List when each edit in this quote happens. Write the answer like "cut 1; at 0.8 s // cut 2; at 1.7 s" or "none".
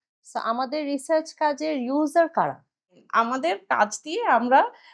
cut 1; at 3.0 s